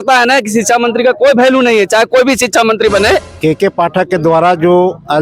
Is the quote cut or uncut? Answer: cut